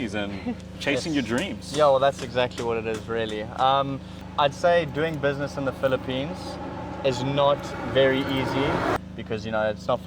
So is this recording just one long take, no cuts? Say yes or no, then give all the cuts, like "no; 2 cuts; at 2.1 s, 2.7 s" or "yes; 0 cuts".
no; 2 cuts; at 4.2 s, 9.0 s